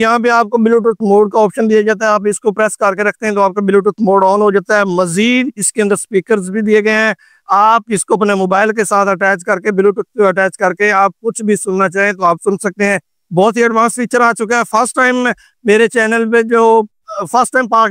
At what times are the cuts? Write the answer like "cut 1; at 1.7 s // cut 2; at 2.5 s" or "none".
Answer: none